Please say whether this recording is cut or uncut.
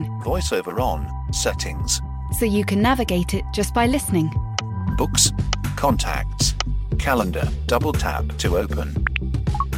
uncut